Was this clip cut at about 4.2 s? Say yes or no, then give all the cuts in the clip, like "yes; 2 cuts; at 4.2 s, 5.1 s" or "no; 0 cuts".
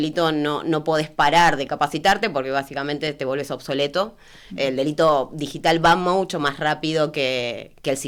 no; 0 cuts